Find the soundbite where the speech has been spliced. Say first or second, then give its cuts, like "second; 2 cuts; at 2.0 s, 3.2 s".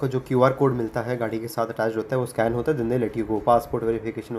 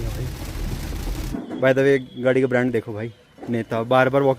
second; 1 cut; at 1.2 s